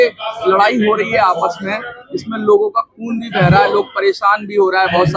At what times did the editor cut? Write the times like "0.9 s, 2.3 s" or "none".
none